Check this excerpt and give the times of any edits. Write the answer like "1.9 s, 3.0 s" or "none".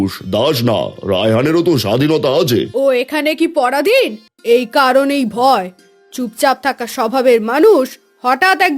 2.7 s, 4.2 s